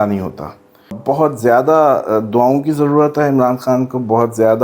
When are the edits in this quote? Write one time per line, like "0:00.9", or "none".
0:01.0